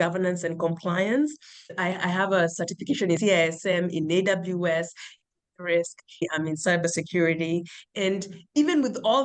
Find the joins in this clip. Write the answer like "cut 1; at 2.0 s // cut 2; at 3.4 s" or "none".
cut 1; at 1.7 s // cut 2; at 6.2 s